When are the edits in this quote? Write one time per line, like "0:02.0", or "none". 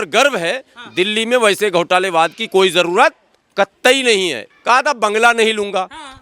0:04.4